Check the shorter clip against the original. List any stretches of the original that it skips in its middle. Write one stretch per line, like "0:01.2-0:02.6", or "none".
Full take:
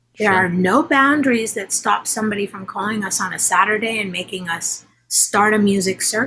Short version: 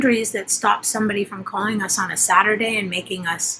none